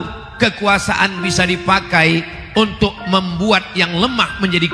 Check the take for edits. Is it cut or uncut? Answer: uncut